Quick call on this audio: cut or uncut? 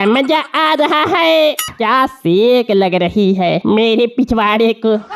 cut